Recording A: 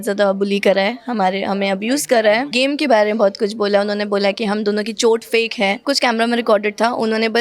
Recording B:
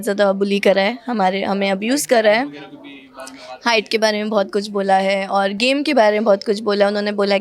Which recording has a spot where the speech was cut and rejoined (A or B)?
A